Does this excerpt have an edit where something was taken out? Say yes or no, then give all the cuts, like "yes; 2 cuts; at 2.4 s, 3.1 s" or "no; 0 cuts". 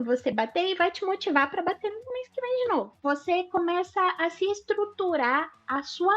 yes; 1 cut; at 2.9 s